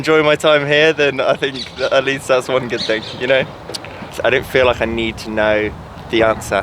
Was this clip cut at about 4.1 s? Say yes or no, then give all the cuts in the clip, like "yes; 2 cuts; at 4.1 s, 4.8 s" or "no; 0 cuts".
yes; 1 cut; at 4.1 s